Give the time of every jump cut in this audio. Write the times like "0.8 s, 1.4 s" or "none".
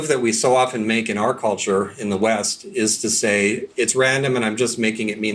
3.7 s